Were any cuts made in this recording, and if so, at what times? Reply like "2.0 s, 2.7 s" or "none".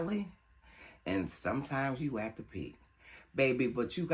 none